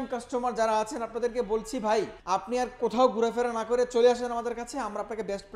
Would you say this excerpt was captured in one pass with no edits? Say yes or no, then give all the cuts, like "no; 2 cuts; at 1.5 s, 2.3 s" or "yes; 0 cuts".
no; 1 cut; at 2.2 s